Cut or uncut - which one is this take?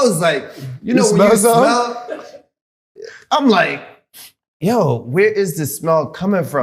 uncut